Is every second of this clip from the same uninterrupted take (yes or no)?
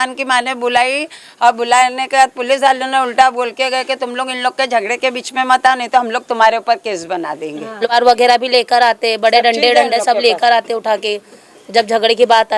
no